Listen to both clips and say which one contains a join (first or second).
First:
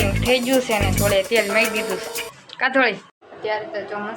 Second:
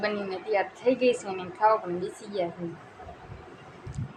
first